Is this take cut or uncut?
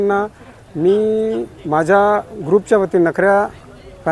uncut